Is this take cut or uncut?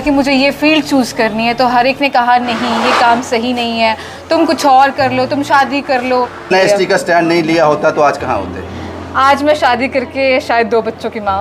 cut